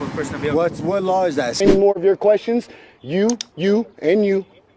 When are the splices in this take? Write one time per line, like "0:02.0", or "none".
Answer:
0:01.6